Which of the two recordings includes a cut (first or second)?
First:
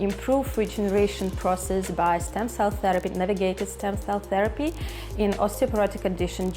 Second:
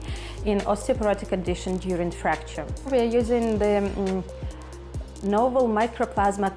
second